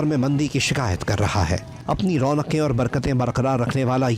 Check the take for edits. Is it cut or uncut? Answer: cut